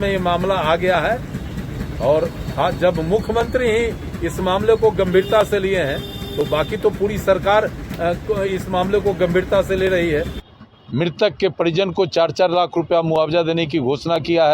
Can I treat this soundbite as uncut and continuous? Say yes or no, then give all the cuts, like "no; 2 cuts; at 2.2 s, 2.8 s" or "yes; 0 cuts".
no; 1 cut; at 10.4 s